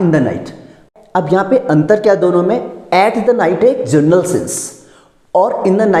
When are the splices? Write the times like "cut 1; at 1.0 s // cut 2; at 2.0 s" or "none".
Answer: none